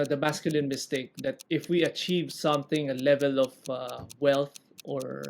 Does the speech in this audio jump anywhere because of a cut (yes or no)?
yes